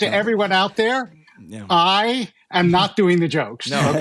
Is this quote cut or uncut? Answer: uncut